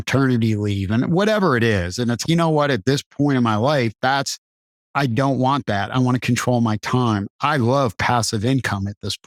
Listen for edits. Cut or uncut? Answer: uncut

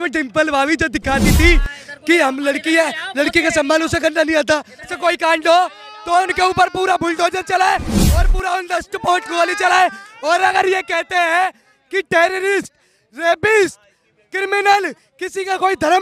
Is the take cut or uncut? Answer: cut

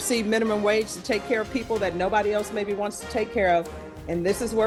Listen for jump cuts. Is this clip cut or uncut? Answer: uncut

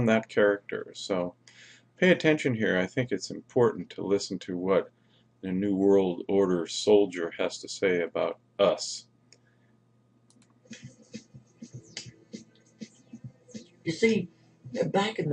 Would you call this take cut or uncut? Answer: uncut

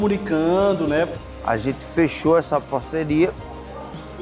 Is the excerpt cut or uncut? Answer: cut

